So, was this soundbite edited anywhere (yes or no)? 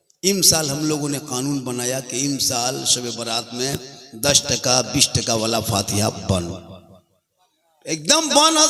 no